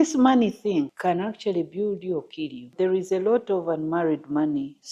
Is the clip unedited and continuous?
no; 2 cuts; at 0.9 s, 2.7 s

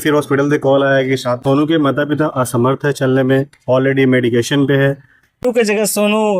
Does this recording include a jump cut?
yes; 2 cuts; at 1.4 s, 5.4 s

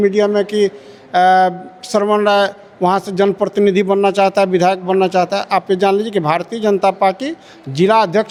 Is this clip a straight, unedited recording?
yes; 0 cuts

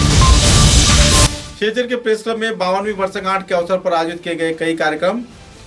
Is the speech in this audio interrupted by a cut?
yes; 1 cut; at 1.4 s

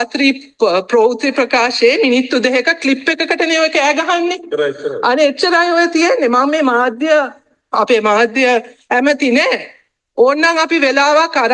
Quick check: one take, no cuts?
yes; 0 cuts

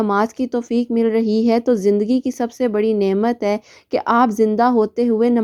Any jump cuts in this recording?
no; 0 cuts

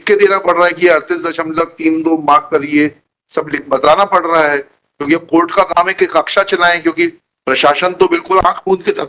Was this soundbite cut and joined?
no; 0 cuts

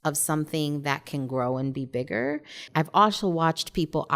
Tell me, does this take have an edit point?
yes; 1 cut; at 2.6 s

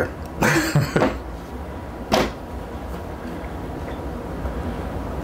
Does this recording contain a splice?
no; 0 cuts

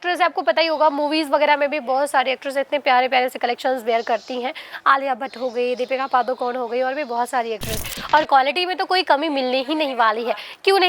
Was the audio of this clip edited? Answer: yes; 1 cut; at 7.9 s

